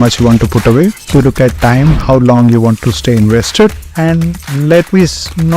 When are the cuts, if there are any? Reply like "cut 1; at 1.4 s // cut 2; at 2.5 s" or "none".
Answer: cut 1; at 1.0 s // cut 2; at 3.8 s